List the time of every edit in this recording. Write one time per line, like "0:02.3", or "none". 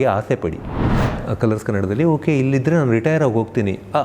0:01.0